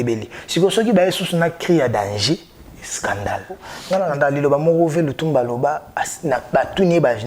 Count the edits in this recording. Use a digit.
1